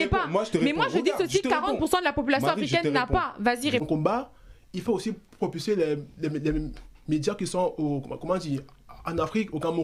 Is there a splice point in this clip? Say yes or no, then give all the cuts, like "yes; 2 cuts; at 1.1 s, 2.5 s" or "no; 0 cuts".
yes; 1 cut; at 3.8 s